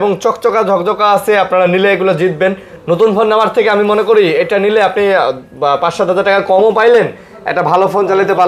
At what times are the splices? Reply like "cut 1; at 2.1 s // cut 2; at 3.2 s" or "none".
none